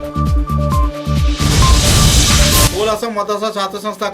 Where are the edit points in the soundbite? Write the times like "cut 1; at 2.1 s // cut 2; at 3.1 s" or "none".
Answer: cut 1; at 2.7 s